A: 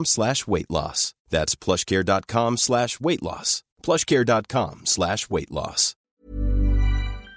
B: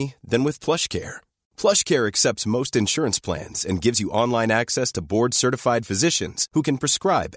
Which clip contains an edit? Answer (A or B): A